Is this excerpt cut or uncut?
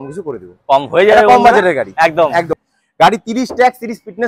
cut